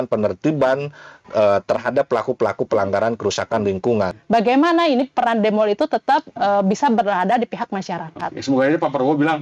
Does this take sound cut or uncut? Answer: cut